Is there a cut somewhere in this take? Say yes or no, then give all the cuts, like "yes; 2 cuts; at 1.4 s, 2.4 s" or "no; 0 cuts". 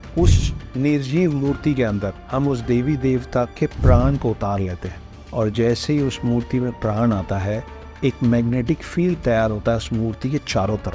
no; 0 cuts